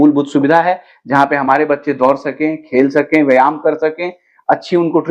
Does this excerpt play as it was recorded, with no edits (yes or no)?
yes